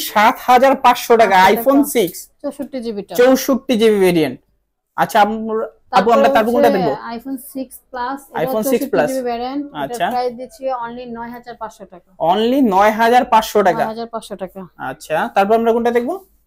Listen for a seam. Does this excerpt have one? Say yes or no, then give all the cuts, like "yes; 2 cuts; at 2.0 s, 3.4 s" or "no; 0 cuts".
no; 0 cuts